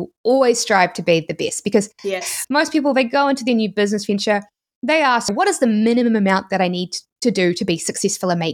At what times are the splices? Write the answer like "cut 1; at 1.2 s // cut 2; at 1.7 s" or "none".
cut 1; at 2.2 s // cut 2; at 5.3 s

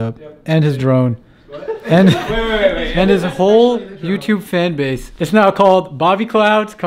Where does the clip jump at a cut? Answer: cut 1; at 5.1 s

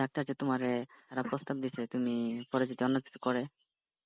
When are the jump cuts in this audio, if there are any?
cut 1; at 1.1 s

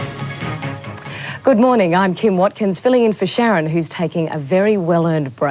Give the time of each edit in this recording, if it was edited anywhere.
cut 1; at 4.5 s

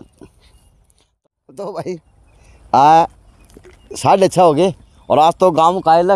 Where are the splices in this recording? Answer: cut 1; at 1.2 s

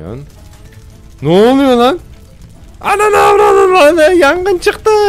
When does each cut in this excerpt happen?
none

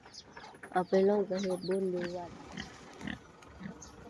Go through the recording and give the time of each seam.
cut 1; at 2.2 s

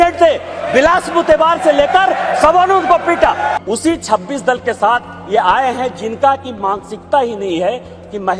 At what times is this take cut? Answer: cut 1; at 3.6 s

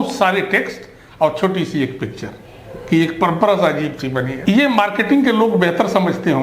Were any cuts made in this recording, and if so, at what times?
cut 1; at 4.3 s

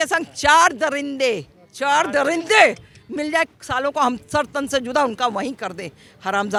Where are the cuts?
none

